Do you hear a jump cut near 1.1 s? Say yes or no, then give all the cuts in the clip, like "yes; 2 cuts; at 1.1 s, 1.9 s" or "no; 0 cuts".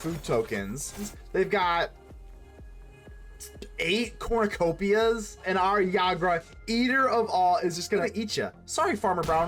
yes; 3 cuts; at 1.1 s, 5.4 s, 8.1 s